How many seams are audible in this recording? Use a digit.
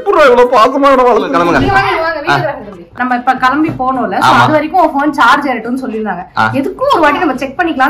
2